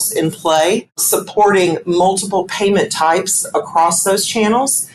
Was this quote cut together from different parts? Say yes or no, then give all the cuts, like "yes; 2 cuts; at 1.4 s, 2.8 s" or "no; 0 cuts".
yes; 1 cut; at 0.9 s